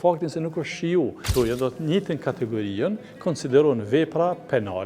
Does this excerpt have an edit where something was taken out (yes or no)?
yes